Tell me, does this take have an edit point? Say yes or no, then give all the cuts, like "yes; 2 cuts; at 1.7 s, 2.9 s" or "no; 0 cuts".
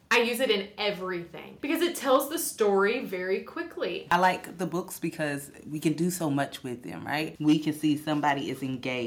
yes; 3 cuts; at 1.5 s, 4.1 s, 7.3 s